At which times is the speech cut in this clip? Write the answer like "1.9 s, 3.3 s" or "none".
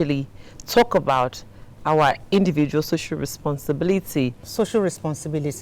4.4 s